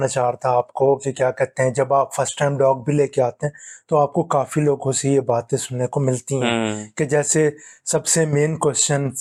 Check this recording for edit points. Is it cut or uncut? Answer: uncut